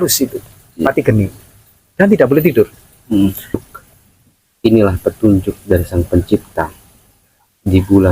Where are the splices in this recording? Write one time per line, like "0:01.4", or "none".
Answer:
0:03.6